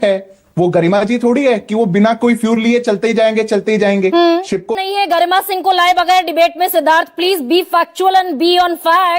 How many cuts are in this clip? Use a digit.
1